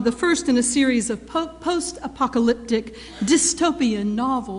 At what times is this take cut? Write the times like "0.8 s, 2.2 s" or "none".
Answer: 3.3 s

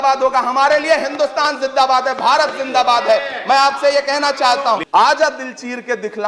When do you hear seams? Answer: 4.8 s

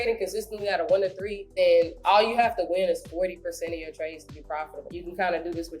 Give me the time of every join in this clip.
1.4 s, 4.9 s

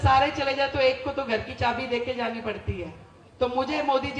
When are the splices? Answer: none

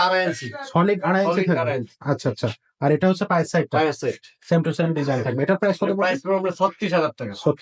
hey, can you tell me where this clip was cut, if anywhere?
none

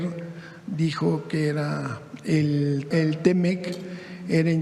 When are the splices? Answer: 2.9 s

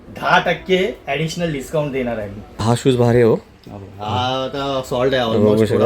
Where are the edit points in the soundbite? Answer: 2.6 s

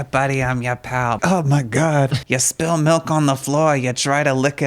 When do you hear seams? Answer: 1.2 s, 2.2 s

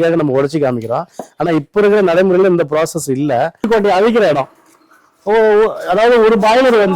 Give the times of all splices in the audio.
3.7 s

